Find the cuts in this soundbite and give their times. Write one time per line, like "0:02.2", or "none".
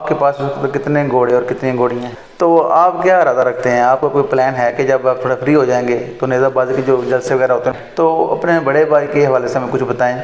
0:02.3
0:07.7